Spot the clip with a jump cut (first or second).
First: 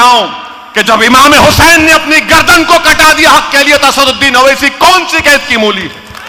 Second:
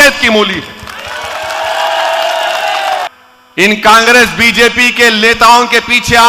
second